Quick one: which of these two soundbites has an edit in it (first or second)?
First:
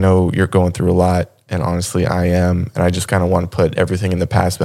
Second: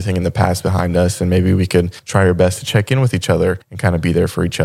second